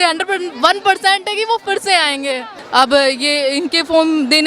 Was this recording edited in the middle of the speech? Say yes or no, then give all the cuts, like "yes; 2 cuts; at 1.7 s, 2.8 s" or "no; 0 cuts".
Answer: yes; 1 cut; at 2.5 s